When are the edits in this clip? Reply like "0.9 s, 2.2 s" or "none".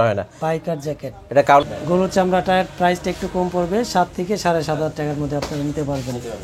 1.6 s